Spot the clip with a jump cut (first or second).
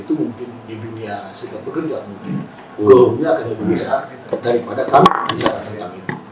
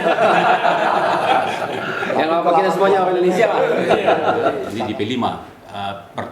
second